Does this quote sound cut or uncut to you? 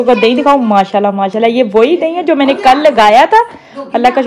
uncut